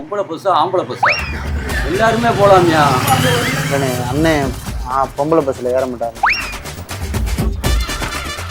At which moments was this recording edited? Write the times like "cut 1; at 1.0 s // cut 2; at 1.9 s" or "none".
none